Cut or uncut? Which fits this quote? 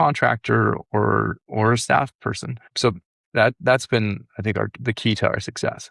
cut